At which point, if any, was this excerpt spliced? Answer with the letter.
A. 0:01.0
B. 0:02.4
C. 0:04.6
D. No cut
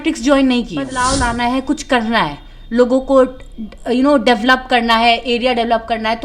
A